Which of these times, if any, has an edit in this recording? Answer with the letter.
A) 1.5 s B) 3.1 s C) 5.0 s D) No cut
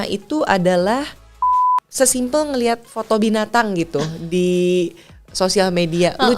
A